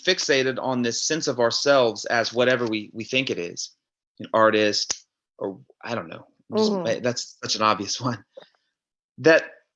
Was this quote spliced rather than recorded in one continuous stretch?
no; 0 cuts

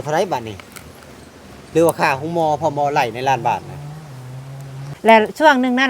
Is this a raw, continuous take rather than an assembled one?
no; 1 cut; at 4.9 s

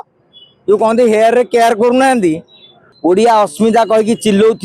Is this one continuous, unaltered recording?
no; 1 cut; at 2.9 s

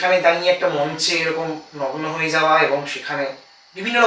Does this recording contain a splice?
no; 0 cuts

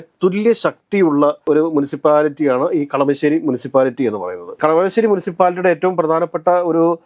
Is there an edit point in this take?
no; 0 cuts

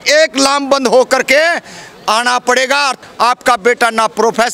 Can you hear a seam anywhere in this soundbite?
yes; 1 cut; at 3.0 s

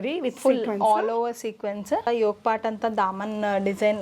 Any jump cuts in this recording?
yes; 1 cut; at 2.0 s

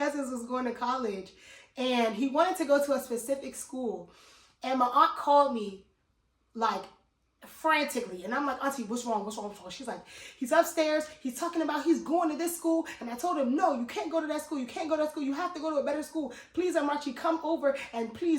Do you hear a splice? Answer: no; 0 cuts

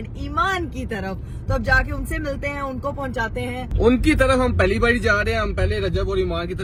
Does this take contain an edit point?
no; 0 cuts

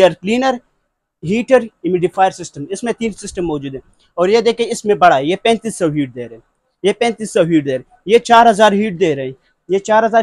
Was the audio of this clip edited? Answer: no; 0 cuts

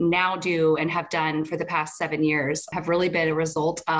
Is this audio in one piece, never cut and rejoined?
no; 1 cut; at 2.7 s

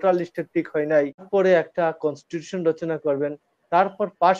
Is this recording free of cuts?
no; 1 cut; at 1.2 s

